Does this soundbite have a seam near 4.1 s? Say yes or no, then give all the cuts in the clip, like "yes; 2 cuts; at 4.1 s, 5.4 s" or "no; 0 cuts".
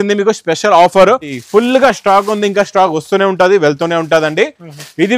no; 1 cut; at 1.3 s